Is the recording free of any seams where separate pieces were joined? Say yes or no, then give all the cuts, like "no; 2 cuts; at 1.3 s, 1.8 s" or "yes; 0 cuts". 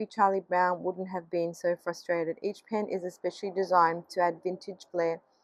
yes; 0 cuts